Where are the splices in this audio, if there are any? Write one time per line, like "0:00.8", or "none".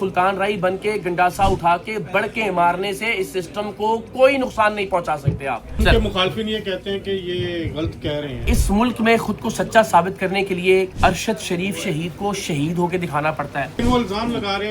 0:05.7
0:08.5
0:10.9
0:13.8